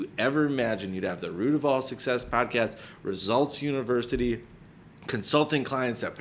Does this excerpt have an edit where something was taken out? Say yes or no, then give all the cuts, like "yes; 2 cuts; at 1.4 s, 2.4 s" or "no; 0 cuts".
no; 0 cuts